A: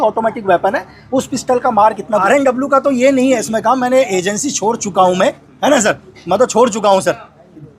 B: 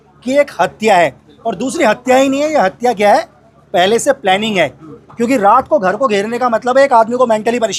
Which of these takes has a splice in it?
A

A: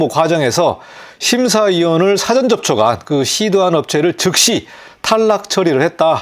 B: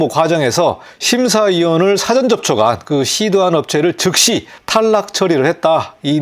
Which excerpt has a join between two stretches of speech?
B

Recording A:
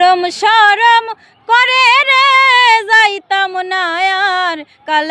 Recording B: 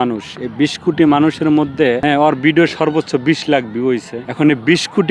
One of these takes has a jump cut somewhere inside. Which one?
B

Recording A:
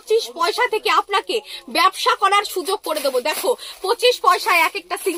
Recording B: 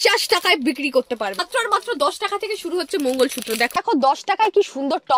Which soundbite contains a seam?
B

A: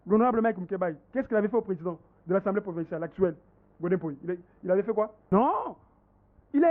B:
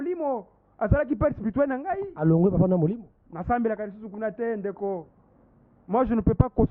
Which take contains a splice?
A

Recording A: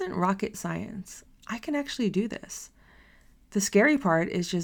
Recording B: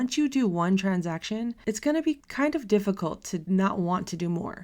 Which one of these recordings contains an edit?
B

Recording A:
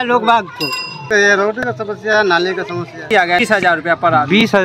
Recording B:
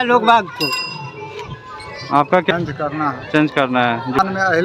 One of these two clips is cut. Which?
A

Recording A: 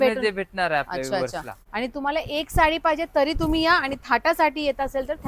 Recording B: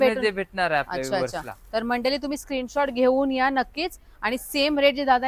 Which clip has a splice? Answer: A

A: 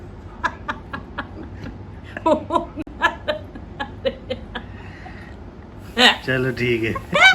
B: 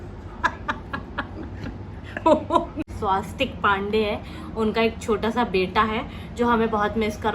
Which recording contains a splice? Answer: B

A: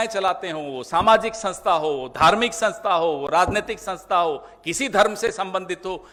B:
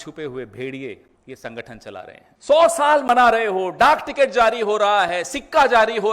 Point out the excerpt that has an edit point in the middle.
B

